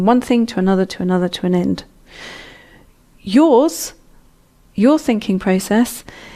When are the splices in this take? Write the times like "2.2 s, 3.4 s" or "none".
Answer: none